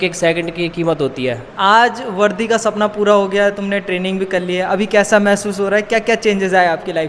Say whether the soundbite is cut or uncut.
cut